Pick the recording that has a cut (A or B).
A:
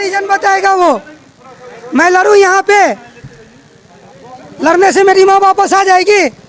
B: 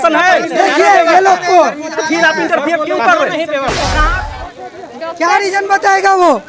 B